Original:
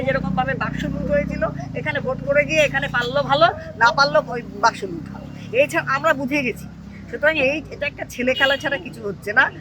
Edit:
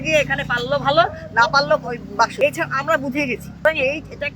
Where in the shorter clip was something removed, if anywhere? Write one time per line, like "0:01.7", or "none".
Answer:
0:02.3
0:03.6